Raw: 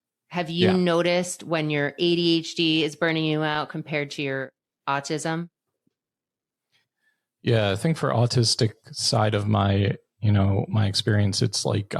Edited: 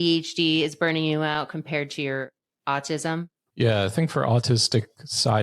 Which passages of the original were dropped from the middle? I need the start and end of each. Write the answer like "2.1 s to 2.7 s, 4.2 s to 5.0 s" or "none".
5.6 s to 7.3 s